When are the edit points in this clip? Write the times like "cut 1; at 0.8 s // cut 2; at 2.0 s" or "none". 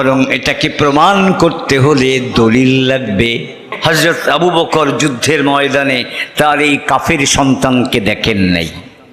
cut 1; at 3.6 s